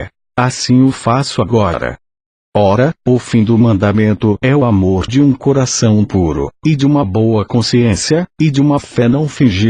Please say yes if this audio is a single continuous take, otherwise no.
no